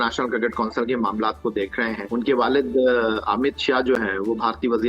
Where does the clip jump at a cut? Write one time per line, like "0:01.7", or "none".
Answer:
0:02.0